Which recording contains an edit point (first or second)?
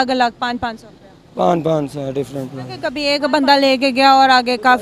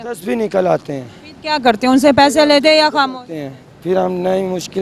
first